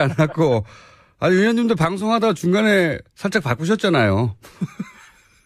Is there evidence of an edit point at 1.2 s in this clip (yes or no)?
yes